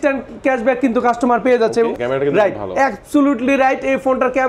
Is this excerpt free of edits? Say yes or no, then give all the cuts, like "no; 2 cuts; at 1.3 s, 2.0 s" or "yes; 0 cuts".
no; 1 cut; at 1.9 s